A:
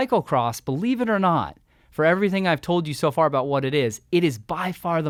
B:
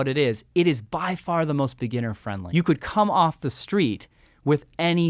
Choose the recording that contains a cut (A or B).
B